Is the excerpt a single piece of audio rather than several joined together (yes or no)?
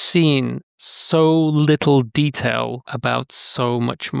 no